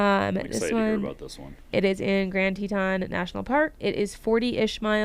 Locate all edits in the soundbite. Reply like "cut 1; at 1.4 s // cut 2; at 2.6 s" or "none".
cut 1; at 1.7 s // cut 2; at 3.8 s